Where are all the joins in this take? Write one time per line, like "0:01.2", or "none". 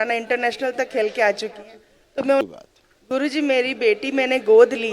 0:02.4